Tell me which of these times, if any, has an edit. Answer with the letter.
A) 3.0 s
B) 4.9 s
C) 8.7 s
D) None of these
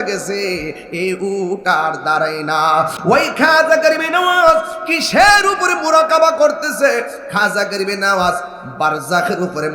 A